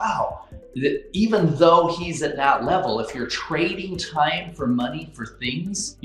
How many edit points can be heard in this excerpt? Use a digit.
0